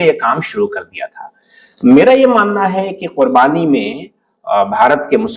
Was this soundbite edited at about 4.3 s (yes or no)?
no